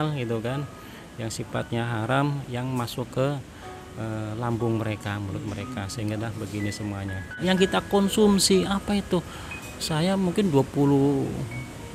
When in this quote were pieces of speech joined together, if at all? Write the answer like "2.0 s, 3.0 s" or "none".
7.4 s